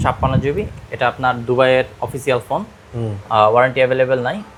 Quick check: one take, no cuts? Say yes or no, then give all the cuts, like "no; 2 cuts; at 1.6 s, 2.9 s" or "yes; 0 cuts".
yes; 0 cuts